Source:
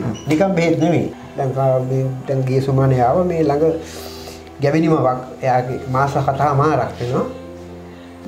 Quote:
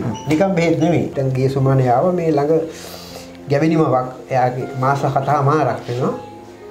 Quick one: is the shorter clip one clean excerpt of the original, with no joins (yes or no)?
no